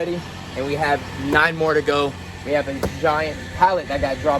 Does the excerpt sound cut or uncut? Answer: cut